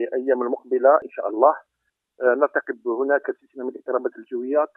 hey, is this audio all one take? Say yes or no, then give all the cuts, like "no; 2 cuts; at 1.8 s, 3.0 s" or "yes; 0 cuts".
no; 1 cut; at 1.6 s